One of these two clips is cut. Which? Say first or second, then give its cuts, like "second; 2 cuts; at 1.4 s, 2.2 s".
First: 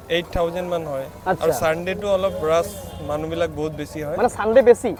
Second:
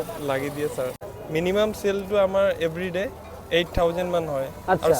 second; 1 cut; at 0.9 s